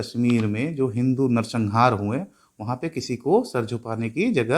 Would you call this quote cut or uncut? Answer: uncut